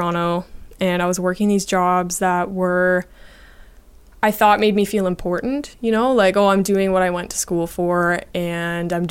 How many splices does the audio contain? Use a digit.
0